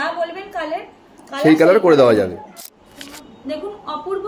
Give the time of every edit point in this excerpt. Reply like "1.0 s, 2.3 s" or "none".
2.5 s